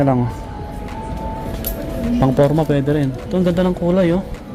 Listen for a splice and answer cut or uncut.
uncut